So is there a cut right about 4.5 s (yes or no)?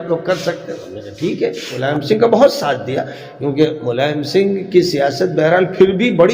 no